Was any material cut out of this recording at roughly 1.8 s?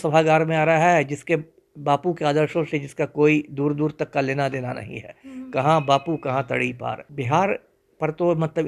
no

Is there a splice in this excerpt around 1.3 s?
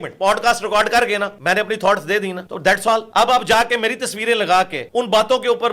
yes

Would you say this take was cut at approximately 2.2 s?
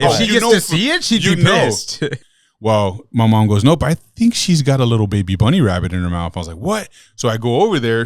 yes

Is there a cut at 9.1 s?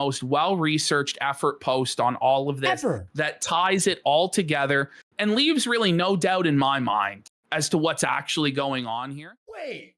yes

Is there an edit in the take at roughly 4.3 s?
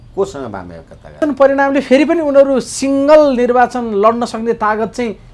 no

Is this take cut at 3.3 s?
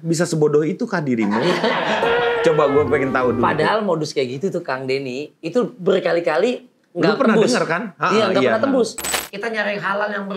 no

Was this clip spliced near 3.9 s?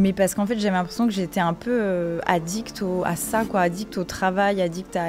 no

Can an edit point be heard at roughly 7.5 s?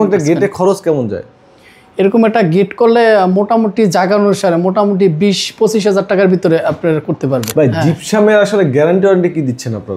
yes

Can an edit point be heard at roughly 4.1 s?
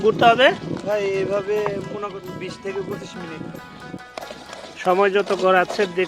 yes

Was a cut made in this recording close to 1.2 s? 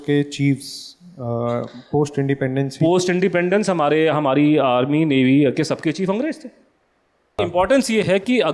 no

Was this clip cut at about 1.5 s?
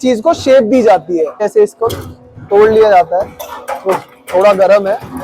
yes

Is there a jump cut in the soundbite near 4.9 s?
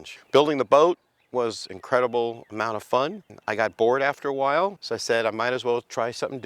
yes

